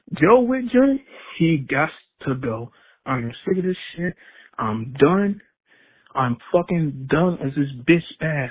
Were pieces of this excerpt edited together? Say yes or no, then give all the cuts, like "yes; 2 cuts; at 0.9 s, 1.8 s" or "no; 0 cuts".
no; 0 cuts